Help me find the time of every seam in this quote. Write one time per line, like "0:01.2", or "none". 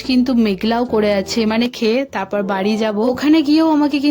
0:01.7